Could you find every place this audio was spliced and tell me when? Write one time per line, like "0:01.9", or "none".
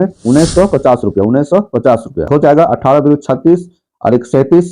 0:02.2